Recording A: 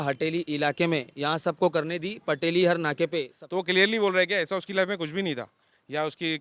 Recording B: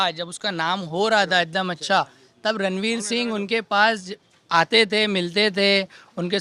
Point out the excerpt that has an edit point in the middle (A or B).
A